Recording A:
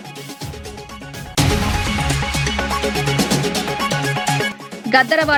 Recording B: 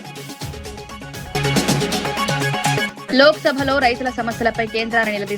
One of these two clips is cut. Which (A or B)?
B